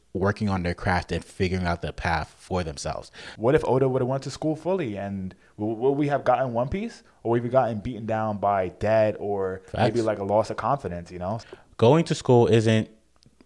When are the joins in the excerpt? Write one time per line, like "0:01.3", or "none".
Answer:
0:03.2
0:11.4